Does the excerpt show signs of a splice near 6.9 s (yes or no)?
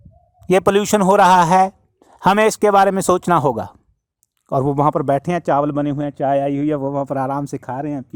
no